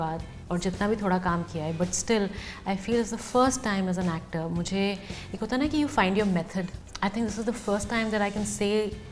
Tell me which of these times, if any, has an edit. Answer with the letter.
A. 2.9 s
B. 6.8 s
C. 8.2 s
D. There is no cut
B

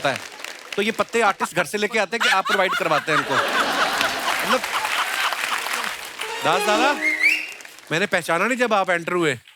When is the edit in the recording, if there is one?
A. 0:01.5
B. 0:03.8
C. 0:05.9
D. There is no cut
C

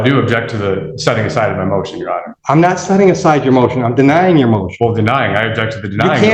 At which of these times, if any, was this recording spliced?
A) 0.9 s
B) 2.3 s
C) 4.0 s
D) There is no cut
B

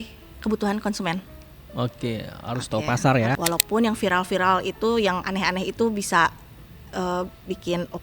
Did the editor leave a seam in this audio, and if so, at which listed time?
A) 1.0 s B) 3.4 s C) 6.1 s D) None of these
B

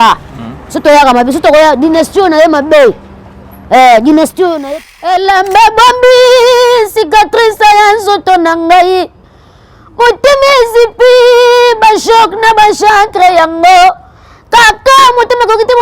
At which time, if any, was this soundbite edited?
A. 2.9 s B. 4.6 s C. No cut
B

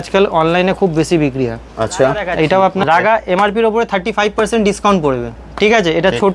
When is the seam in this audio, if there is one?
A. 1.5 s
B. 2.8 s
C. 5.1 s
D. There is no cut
B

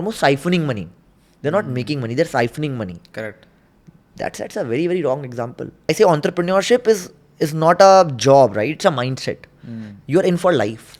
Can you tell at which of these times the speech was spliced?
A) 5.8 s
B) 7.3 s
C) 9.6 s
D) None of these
A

